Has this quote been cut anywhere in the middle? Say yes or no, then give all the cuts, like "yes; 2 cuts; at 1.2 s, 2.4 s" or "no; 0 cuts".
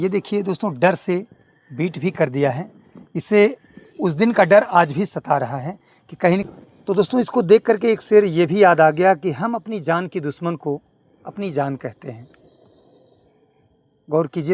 yes; 1 cut; at 6.4 s